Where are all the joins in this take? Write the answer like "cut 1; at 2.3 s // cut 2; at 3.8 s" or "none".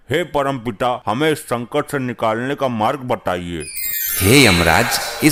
none